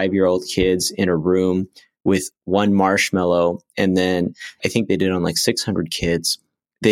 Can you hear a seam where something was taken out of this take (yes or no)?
yes